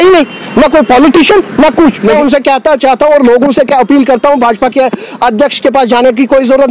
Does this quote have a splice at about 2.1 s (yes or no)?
yes